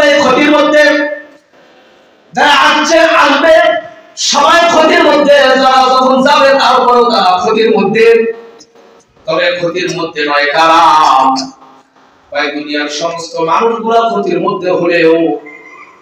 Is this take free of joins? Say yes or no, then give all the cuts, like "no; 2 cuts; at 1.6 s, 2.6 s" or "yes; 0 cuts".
yes; 0 cuts